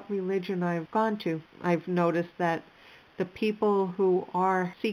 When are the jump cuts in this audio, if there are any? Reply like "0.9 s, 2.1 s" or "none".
none